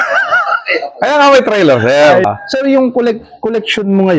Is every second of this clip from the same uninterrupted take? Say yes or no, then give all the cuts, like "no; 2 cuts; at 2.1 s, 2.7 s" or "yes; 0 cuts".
no; 1 cut; at 2.2 s